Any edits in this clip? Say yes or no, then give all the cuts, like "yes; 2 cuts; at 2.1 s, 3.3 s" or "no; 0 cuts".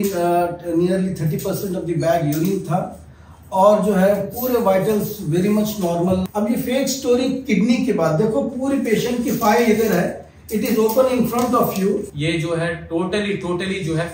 yes; 2 cuts; at 6.2 s, 12.1 s